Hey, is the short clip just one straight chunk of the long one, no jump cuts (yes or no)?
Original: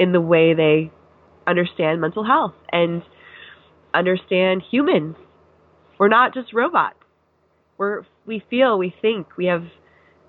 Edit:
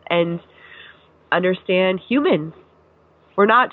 yes